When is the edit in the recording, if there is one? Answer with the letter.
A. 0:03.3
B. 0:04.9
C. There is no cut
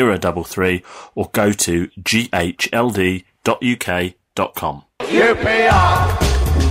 B